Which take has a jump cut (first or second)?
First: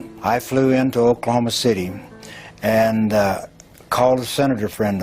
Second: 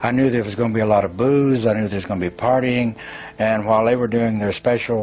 first